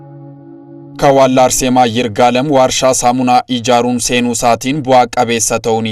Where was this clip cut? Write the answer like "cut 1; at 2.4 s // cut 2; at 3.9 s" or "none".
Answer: cut 1; at 0.9 s